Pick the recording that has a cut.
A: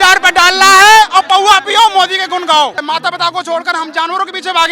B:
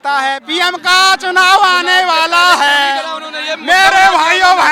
A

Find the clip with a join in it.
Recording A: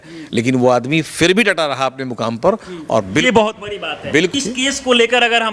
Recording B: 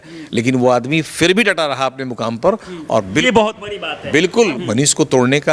B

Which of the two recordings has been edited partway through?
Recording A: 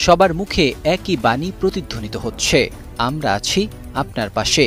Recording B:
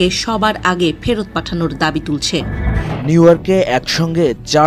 B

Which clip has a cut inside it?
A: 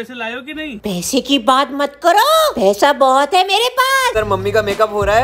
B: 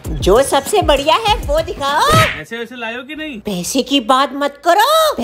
A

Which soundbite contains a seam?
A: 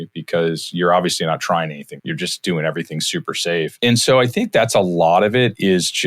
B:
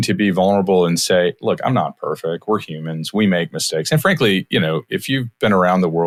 A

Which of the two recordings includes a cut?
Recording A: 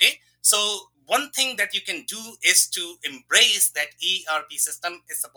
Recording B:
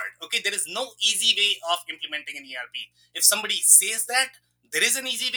A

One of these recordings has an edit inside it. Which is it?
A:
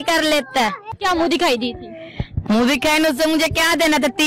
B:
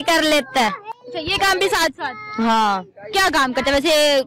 A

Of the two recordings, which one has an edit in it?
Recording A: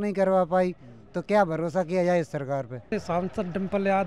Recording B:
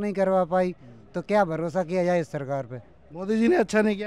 A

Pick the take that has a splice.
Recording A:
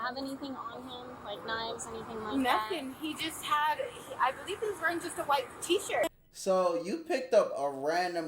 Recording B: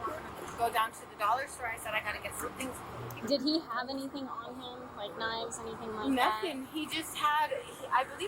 A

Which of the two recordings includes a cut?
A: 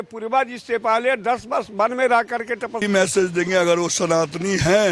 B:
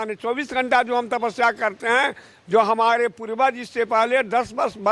A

